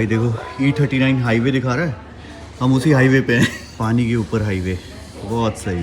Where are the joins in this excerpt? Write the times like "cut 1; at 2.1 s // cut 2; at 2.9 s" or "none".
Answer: cut 1; at 3.7 s